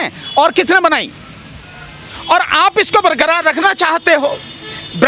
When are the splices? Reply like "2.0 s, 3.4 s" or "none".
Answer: none